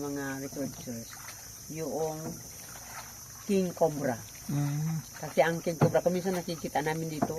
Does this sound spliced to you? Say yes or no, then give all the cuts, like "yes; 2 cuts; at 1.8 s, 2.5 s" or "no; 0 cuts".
no; 0 cuts